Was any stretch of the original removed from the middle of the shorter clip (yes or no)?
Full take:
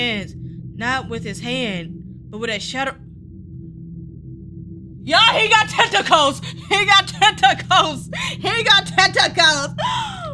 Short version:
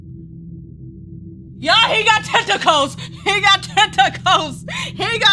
no